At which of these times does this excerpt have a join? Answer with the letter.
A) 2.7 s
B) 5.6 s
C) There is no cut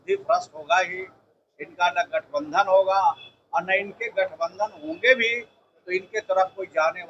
C